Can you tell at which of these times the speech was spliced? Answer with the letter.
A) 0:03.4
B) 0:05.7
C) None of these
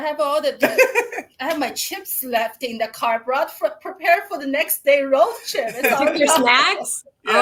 C